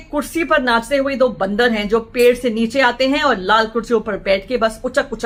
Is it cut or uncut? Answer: uncut